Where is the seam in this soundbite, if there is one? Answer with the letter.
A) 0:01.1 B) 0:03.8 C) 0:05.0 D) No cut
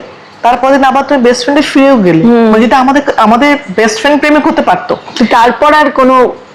D